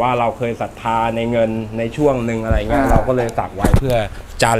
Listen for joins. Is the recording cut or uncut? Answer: uncut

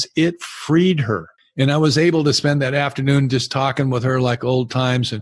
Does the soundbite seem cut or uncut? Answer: cut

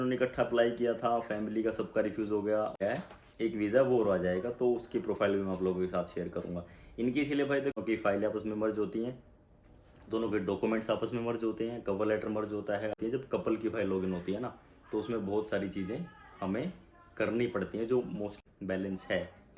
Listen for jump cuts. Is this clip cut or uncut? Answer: cut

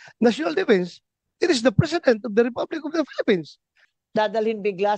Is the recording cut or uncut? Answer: cut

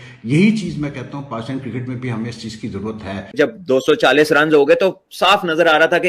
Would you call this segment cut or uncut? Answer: cut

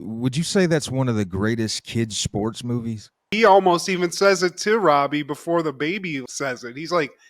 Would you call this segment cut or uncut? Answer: cut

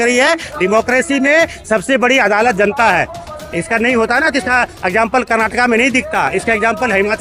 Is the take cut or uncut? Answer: uncut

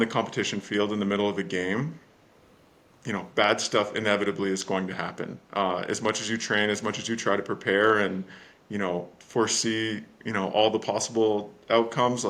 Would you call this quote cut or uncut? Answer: uncut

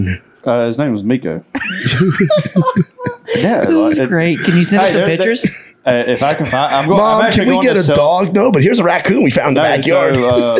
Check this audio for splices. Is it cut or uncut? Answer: uncut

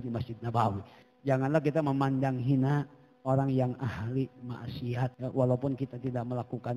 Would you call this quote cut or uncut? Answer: cut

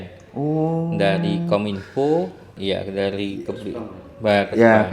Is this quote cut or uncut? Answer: cut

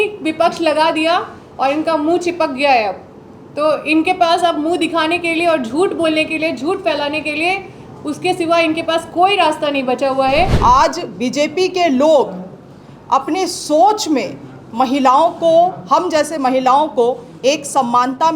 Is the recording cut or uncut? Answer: cut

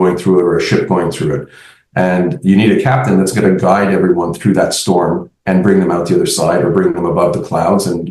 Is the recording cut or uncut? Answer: uncut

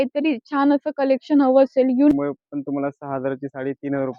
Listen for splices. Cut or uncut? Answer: cut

